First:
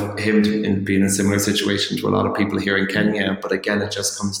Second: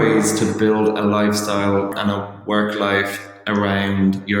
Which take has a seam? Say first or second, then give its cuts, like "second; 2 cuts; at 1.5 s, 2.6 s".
second; 1 cut; at 1.9 s